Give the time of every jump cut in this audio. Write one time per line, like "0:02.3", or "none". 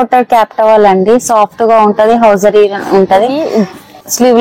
0:03.4

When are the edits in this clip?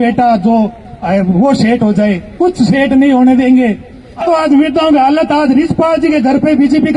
0:04.2

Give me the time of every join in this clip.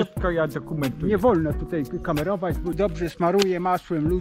0:02.8

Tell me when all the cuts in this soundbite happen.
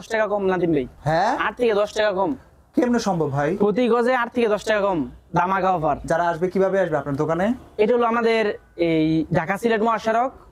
none

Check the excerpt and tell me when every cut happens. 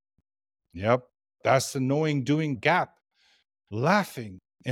0:02.5

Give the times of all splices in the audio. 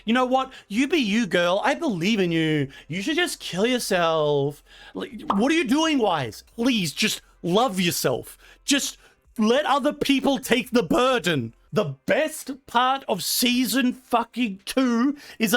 0:06.4
0:11.6

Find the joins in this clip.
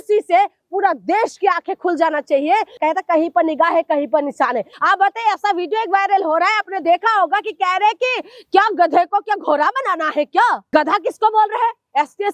0:02.7
0:04.7
0:10.6

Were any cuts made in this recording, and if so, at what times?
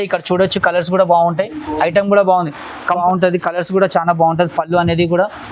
0:03.0

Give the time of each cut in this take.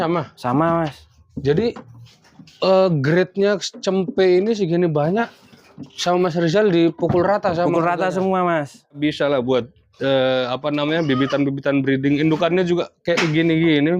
0:09.0

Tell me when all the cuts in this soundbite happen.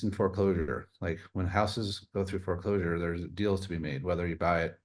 none

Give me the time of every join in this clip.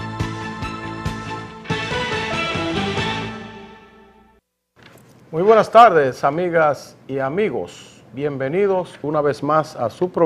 none

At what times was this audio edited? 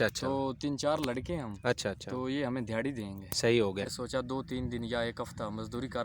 0:03.9

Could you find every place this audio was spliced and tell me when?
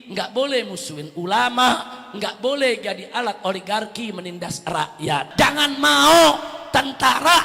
0:05.3

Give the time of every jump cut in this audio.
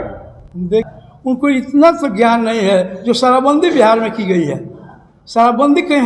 0:00.9

